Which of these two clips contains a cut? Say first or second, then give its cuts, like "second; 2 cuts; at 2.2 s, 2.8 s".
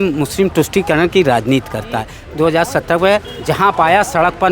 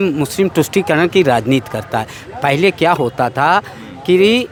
first; 1 cut; at 2.2 s